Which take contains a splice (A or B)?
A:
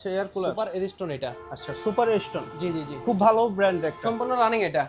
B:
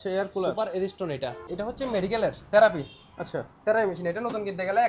B